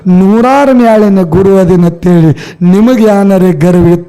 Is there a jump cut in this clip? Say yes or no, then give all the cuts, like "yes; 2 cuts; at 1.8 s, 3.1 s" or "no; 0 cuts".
no; 0 cuts